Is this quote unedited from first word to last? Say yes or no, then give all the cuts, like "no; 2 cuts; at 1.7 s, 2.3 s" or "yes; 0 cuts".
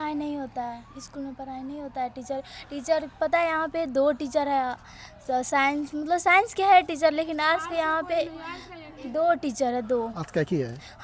yes; 0 cuts